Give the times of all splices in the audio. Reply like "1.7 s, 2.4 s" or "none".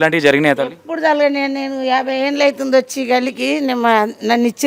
none